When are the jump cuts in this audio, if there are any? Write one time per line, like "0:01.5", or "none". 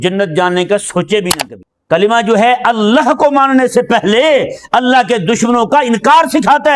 0:01.3